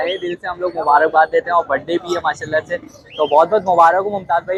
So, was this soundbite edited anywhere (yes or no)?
no